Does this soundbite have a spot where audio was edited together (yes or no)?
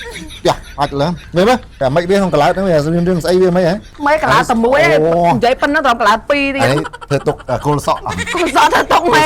yes